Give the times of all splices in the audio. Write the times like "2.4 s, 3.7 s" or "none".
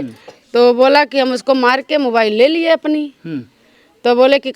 none